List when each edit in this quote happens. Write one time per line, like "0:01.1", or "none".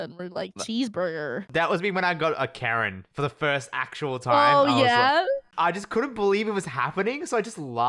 0:01.5
0:05.5